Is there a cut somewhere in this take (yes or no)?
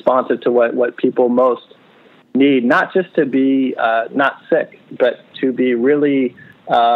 no